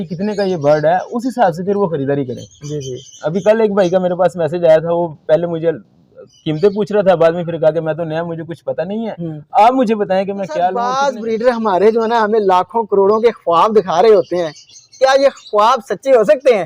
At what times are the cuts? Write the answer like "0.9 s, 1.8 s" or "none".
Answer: 10.8 s

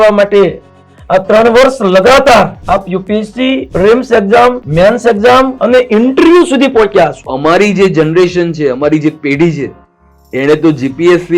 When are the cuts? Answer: 2.6 s, 3.7 s, 4.6 s, 5.6 s, 7.3 s

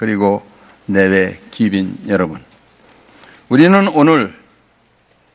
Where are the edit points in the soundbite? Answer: none

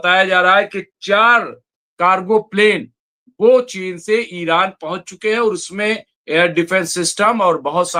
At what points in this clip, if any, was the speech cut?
none

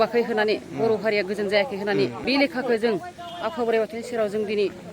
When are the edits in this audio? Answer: 2.2 s

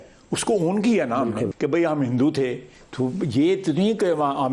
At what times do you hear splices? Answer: 1.5 s

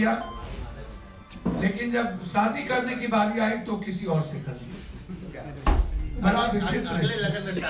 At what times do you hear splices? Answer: 5.3 s

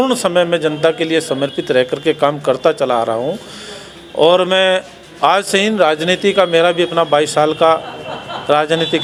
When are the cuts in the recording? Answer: none

